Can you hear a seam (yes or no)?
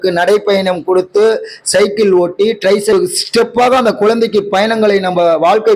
yes